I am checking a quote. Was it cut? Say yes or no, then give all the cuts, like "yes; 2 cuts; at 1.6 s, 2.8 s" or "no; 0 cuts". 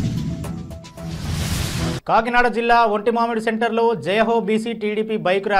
yes; 1 cut; at 2.0 s